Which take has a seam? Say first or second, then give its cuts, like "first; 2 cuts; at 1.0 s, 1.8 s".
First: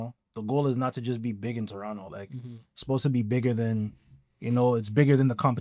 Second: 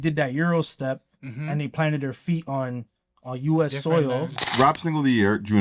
second; 1 cut; at 4.5 s